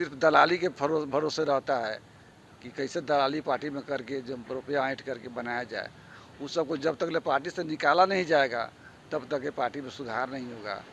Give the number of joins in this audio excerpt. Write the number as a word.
zero